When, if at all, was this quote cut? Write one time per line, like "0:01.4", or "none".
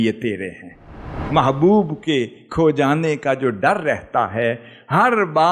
0:01.2